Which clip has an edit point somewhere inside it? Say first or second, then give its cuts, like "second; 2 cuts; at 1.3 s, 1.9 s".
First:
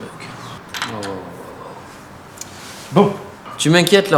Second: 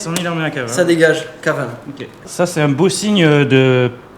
second; 1 cut; at 2.2 s